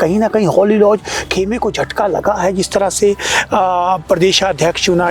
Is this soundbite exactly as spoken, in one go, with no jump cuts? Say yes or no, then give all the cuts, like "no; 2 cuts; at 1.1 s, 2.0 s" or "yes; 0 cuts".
yes; 0 cuts